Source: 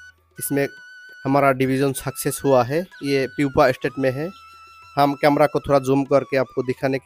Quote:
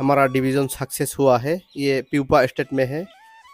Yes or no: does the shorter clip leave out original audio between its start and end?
no